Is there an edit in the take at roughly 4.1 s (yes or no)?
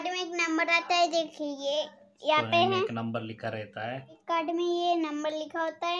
yes